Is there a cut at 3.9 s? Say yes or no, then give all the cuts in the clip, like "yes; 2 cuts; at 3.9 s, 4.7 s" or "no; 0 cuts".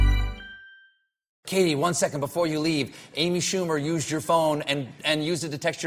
no; 1 cut; at 1.4 s